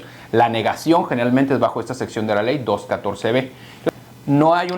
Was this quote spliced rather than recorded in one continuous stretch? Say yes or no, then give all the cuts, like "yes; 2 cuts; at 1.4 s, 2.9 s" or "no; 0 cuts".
yes; 1 cut; at 3.9 s